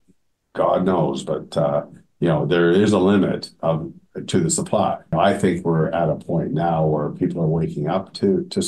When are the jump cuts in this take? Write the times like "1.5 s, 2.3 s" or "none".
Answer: 5.1 s